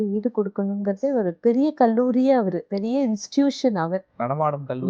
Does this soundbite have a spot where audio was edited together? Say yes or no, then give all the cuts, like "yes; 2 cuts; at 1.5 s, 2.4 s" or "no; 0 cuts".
yes; 2 cuts; at 1.3 s, 2.7 s